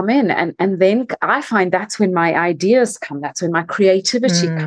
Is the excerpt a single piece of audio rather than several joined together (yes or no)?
yes